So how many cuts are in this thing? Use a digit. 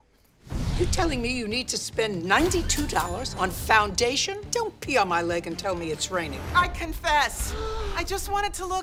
0